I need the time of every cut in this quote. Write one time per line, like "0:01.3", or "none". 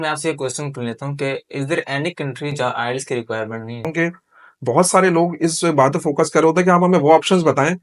0:03.9